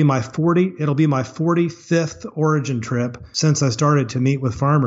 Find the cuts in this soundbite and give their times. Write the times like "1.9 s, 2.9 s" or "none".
3.2 s